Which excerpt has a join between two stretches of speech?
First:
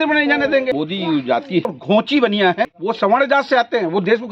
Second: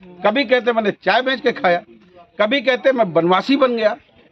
first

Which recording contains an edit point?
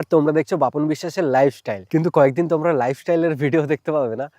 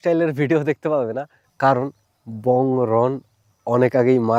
first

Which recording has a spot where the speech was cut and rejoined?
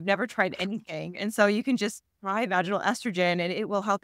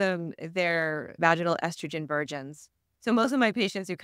second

